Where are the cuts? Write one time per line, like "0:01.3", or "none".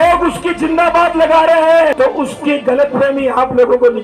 0:01.9